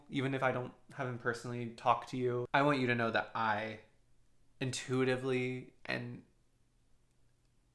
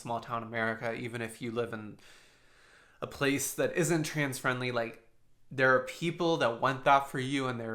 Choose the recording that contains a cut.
first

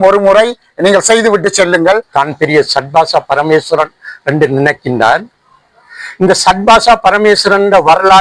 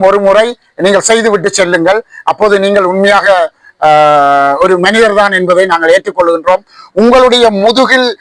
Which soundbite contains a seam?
first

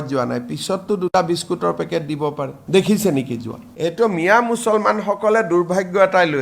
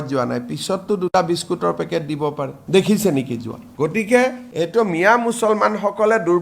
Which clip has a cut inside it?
first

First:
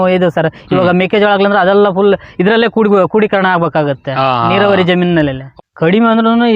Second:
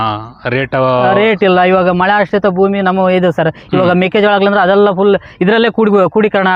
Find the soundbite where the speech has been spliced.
first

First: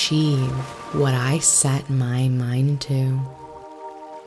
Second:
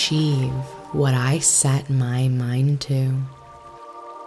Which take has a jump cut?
first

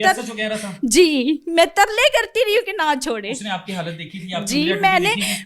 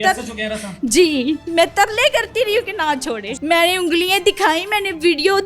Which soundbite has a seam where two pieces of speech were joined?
second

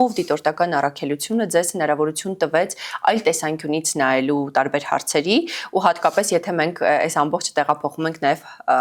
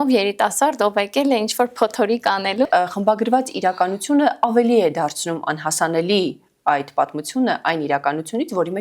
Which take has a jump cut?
second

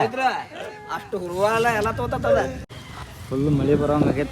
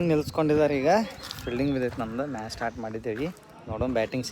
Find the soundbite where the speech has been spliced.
first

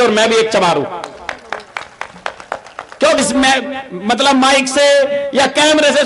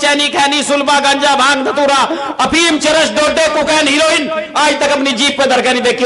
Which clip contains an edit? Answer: first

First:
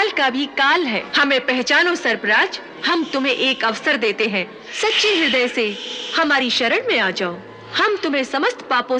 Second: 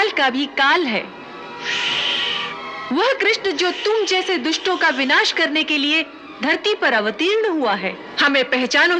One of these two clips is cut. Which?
first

